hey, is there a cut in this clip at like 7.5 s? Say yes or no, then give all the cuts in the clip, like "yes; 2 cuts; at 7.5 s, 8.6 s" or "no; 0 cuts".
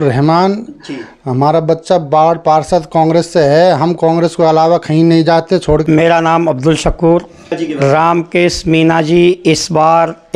yes; 2 cuts; at 5.8 s, 7.5 s